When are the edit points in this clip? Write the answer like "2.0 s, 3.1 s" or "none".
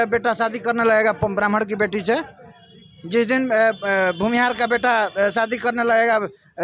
none